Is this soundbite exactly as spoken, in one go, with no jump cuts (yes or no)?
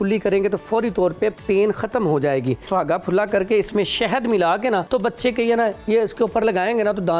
no